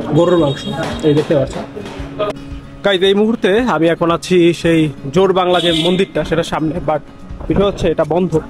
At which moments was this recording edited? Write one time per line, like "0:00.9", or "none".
0:02.4